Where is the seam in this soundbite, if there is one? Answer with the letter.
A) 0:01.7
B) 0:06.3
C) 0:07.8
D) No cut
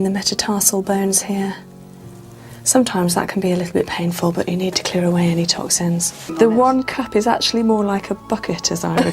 B